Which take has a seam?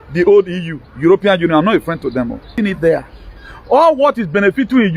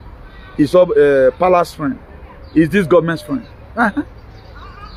first; 1 cut; at 2.5 s

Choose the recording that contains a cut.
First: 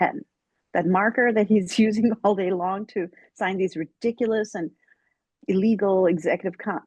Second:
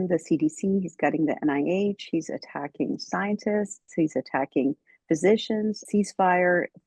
second; 1 cut; at 5.8 s

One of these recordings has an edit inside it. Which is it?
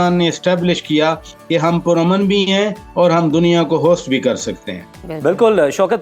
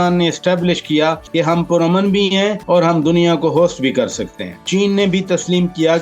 second; 3 cuts; at 1.2 s, 2.6 s, 4.6 s

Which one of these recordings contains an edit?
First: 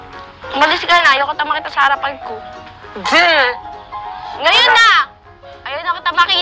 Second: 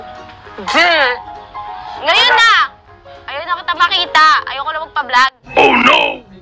second; 1 cut; at 5.4 s

